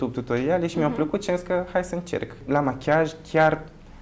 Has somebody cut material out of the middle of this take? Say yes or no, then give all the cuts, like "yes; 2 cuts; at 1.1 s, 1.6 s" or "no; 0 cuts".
yes; 1 cut; at 2.4 s